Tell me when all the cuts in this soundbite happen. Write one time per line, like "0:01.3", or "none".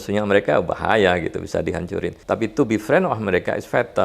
0:02.1